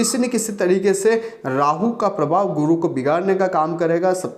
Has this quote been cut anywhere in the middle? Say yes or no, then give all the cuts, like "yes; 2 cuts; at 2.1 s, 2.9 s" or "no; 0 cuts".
no; 0 cuts